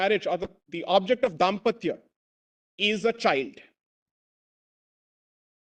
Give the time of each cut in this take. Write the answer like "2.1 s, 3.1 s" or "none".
none